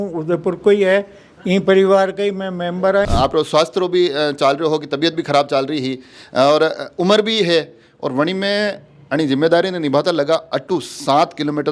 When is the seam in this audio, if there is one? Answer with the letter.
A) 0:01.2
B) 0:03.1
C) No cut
B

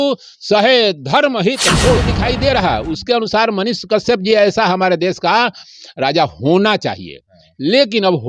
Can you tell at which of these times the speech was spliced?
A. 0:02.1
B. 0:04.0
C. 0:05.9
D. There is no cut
A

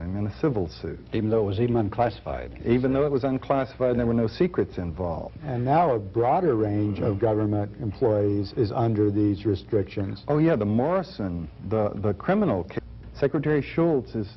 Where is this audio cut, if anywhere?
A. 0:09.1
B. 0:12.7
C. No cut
C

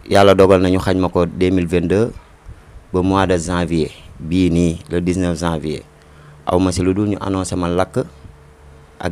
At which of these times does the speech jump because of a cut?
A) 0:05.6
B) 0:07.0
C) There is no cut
C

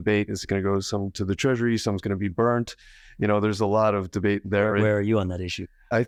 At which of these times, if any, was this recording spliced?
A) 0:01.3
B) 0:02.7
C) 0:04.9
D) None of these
D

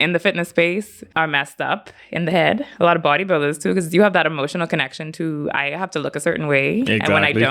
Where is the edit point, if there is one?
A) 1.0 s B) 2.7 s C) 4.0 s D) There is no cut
A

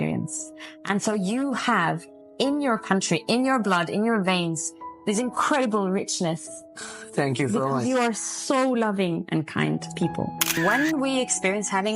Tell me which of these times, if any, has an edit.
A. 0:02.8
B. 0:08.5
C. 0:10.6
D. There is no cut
C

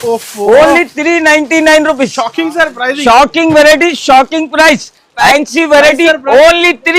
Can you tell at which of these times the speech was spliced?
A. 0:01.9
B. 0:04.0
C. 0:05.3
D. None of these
C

